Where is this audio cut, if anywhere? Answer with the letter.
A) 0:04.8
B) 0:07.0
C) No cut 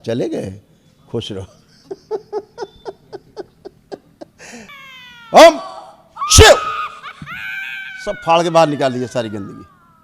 A